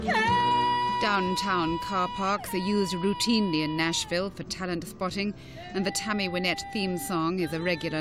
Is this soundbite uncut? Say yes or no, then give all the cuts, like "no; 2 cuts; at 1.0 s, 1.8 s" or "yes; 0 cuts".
no; 1 cut; at 3.1 s